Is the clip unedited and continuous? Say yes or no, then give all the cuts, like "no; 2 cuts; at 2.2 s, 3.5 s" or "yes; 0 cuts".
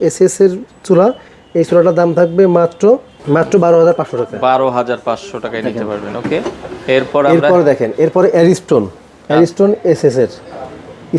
yes; 0 cuts